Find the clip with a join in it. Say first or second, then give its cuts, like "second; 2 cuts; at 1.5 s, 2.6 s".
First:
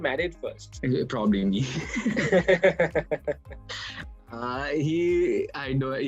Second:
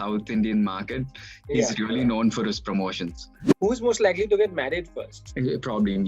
second; 1 cut; at 3.5 s